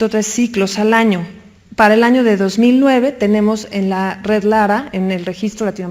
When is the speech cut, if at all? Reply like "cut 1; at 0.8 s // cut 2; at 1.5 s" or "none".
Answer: cut 1; at 1.0 s